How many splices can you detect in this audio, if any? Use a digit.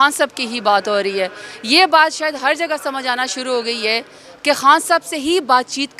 0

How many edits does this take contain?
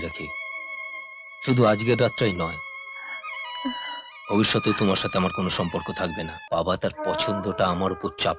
1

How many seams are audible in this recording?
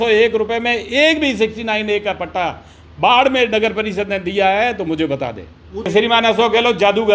1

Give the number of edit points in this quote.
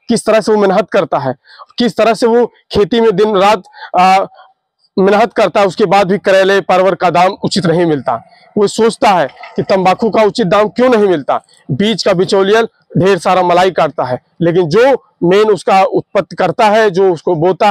0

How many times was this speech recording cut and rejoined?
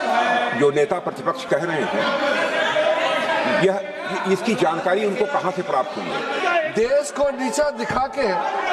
1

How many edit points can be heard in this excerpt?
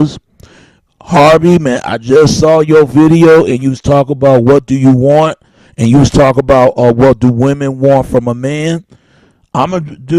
1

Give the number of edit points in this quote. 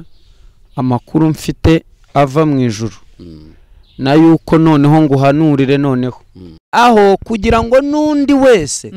1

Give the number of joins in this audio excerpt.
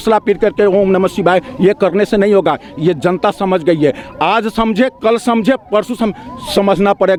0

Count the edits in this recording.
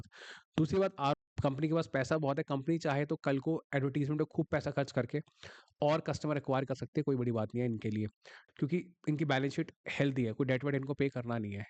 2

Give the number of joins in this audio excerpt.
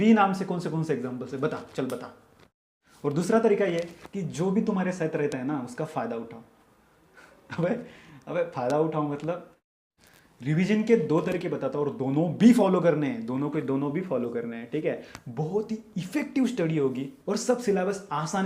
2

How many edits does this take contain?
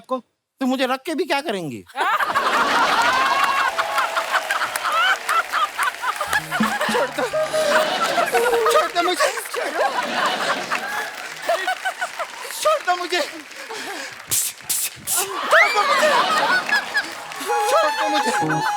1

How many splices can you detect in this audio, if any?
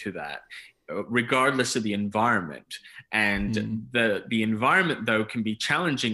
0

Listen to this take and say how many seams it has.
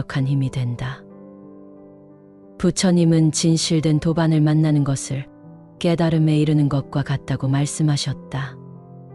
0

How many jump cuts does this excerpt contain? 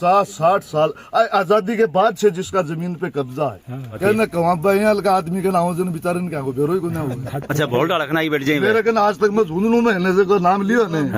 1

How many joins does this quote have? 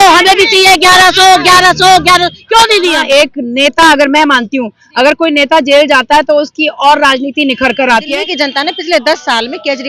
2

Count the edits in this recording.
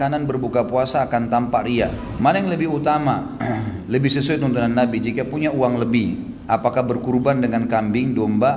1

